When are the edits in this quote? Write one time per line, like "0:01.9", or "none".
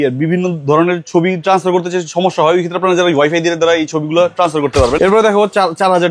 0:05.0